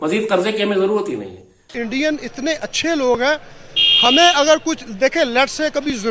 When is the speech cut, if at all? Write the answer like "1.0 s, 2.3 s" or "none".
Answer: 1.8 s